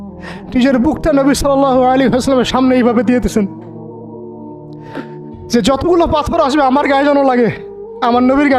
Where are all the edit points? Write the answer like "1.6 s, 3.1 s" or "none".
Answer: none